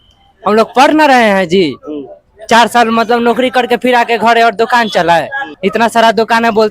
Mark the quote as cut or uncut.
cut